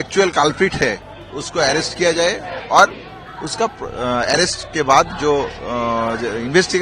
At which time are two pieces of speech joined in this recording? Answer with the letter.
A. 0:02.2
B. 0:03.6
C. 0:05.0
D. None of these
D